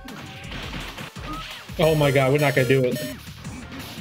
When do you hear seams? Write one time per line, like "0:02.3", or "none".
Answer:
none